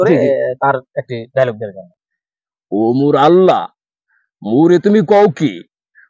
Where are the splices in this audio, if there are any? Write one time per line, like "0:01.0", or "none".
0:01.8